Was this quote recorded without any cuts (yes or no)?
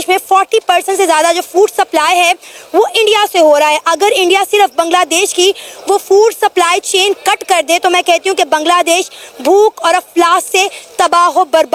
yes